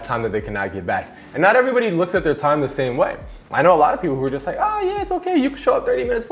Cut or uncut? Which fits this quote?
uncut